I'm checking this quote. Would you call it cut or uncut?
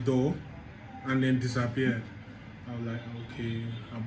uncut